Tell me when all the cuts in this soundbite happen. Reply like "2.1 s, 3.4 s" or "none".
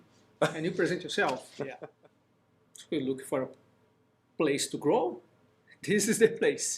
1.8 s

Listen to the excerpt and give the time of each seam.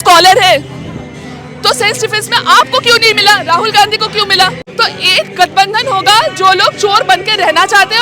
4.6 s

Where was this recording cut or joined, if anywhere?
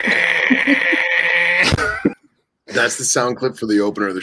2.1 s

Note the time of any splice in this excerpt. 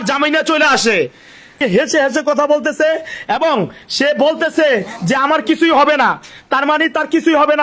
1.6 s

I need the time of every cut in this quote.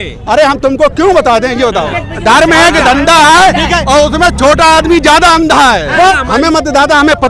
2.1 s, 6.2 s

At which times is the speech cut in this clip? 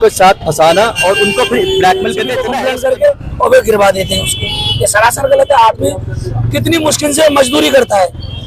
2.4 s

